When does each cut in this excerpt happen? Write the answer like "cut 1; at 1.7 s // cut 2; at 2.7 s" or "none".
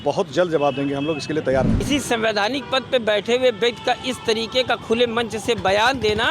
cut 1; at 1.9 s